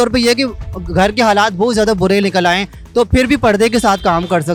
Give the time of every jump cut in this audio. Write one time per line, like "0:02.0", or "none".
none